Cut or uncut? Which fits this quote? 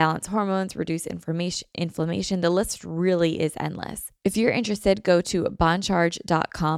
cut